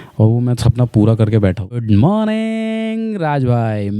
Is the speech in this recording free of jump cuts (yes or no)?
no